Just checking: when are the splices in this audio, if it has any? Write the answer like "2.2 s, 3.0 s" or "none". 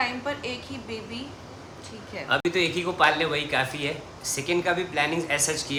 none